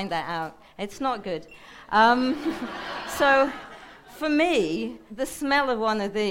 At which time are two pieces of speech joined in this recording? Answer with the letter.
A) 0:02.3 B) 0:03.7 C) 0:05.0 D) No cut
C